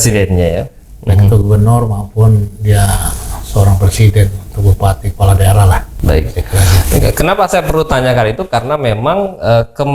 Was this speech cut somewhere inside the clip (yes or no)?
no